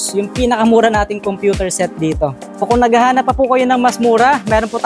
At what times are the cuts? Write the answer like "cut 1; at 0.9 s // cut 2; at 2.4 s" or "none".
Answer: cut 1; at 2.3 s

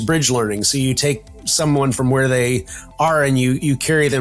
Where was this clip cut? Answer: none

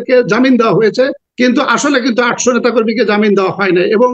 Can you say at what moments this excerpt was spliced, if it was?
cut 1; at 1.2 s

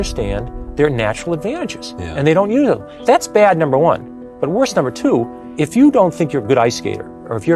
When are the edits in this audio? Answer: cut 1; at 2.9 s // cut 2; at 5.4 s

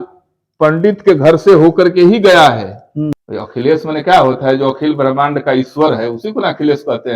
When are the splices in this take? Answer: cut 1; at 3.1 s

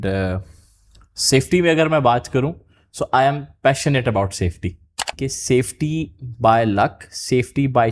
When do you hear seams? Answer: cut 1; at 5.3 s

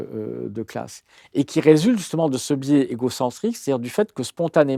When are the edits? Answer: none

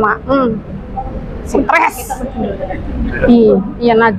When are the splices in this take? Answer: none

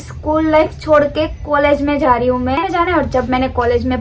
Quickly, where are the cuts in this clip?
cut 1; at 2.6 s

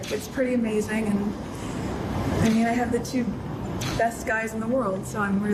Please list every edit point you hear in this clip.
none

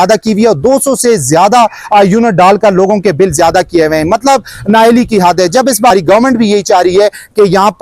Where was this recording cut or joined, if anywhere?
cut 1; at 5.9 s

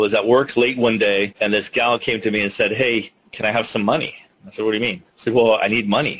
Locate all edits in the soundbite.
cut 1; at 1.3 s // cut 2; at 5.1 s

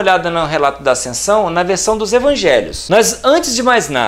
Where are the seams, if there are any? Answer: cut 1; at 2.8 s

